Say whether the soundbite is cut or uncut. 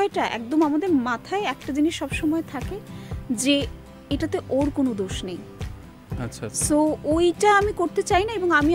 uncut